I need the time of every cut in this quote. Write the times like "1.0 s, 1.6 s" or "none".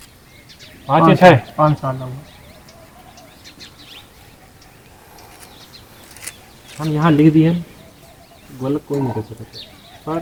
none